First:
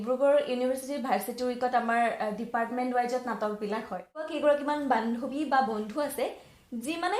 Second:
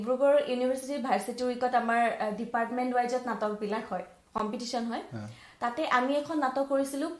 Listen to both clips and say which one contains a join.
first; 1 cut; at 4.3 s

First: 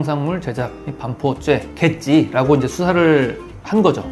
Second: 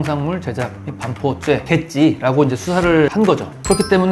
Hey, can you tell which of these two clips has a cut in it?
second; 2 cuts; at 1.6 s, 3.1 s

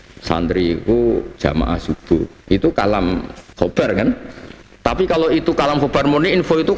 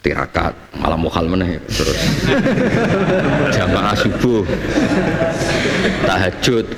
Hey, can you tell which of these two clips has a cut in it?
first; 2 cuts; at 1.3 s, 3.4 s

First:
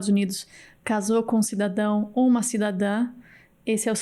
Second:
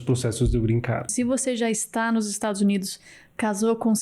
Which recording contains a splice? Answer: second; 1 cut; at 1.1 s

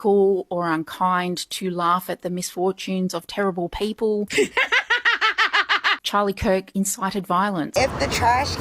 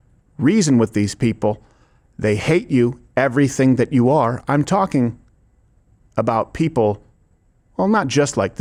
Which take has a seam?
first; 1 cut; at 7.7 s

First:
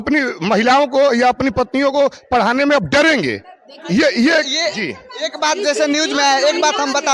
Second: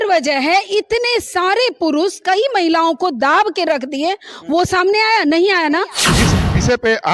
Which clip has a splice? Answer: second; 1 cut; at 6.1 s

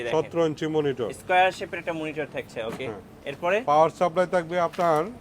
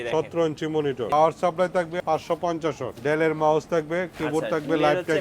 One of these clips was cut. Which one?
second; 3 cuts; at 1.1 s, 2.0 s, 2.9 s

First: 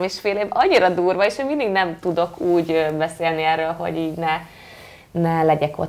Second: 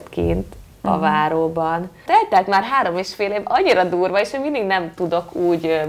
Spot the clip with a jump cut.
second; 1 cut; at 1.9 s

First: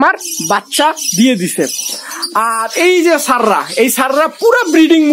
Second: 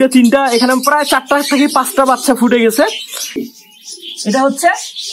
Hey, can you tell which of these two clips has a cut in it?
second; 1 cut; at 3.4 s

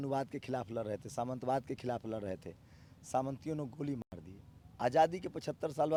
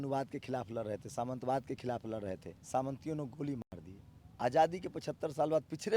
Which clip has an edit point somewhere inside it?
second; 1 cut; at 2.5 s

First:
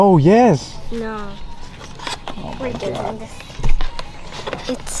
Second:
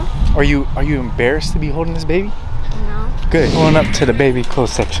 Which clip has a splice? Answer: second; 1 cut; at 3.5 s

